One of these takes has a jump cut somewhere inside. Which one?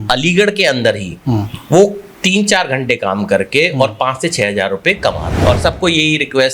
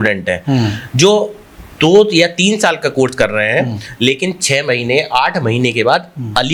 first; 1 cut; at 5.3 s

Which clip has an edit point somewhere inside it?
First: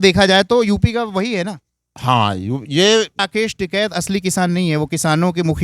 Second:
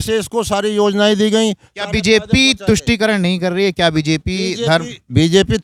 first; 1 cut; at 3.2 s

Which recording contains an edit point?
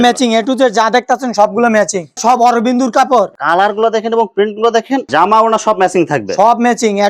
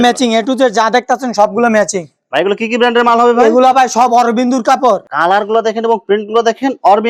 first; 2 cuts; at 2.2 s, 5.1 s

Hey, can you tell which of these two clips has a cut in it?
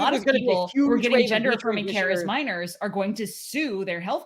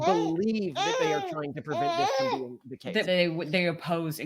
second; 1 cut; at 3.0 s

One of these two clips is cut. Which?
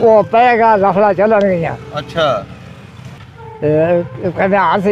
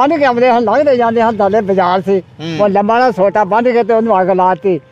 first; 1 cut; at 3.1 s

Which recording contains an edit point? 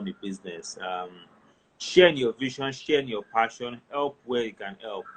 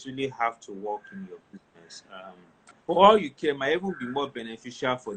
second; 1 cut; at 2.6 s

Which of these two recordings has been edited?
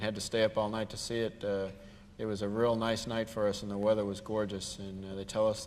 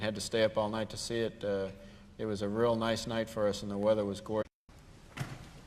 first; 1 cut; at 4.4 s

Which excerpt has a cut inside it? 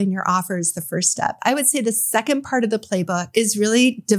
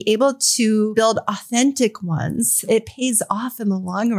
second; 2 cuts; at 1.0 s, 2.7 s

